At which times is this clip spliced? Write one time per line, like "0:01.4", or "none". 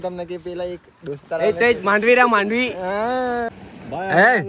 0:03.5